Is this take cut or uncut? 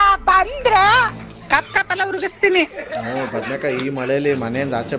uncut